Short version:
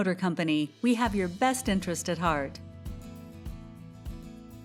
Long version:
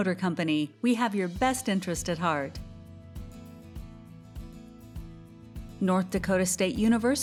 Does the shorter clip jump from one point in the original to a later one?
yes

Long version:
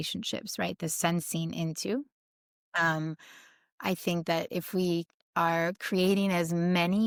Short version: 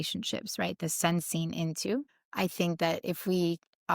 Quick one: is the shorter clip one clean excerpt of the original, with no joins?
no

